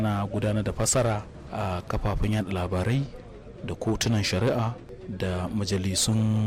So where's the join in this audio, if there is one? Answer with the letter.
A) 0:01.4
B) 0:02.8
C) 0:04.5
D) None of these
D